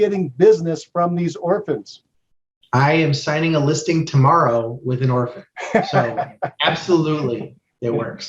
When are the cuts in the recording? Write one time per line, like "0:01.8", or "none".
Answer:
none